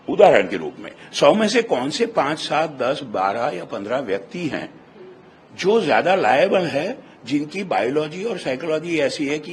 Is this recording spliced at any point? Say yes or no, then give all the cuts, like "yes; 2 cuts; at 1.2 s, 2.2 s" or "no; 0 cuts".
no; 0 cuts